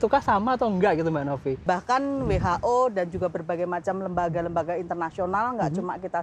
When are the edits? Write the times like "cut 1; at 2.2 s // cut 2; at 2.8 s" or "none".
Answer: cut 1; at 1.6 s